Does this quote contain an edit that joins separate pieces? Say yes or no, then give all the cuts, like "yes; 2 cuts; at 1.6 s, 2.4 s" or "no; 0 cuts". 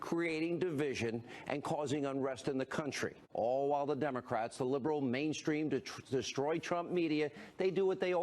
no; 0 cuts